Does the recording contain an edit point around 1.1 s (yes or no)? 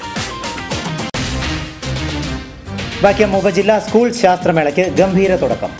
yes